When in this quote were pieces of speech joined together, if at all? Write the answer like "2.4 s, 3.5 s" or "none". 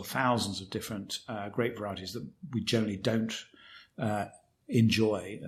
none

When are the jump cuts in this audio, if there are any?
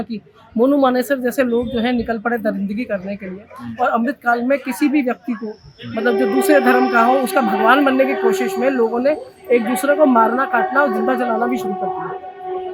none

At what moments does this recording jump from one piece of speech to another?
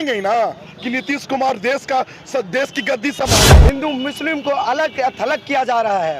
3.4 s

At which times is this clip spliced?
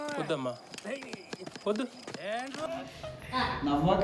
none

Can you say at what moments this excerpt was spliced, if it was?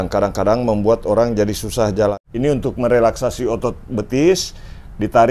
2.2 s

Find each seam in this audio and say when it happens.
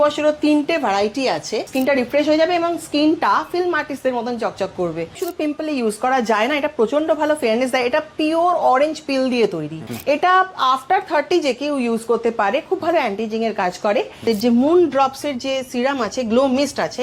1.7 s, 5.2 s, 9.9 s, 14.2 s

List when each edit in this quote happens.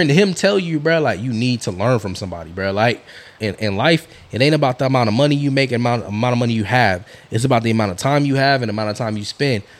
3.4 s

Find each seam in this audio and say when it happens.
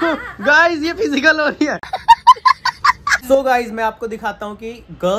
none

